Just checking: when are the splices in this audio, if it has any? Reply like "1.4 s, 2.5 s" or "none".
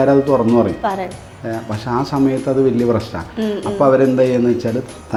none